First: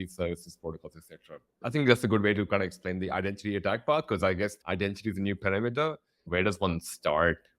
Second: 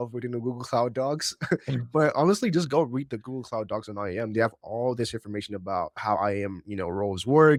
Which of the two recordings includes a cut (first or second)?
first